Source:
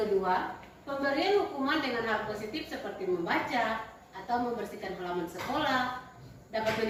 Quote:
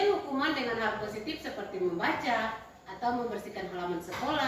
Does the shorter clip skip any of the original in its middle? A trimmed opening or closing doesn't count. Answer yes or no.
no